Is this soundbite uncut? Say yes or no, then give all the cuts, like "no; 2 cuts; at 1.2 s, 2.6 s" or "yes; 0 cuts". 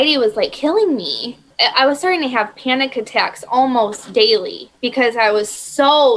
no; 1 cut; at 1.5 s